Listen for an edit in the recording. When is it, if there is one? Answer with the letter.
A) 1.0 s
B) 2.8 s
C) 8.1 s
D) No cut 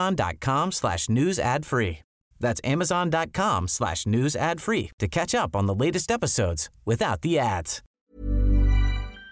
C